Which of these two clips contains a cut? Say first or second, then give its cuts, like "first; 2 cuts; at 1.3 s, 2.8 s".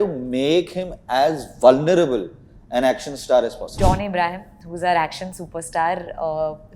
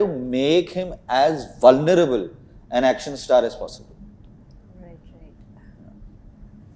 first; 1 cut; at 3.8 s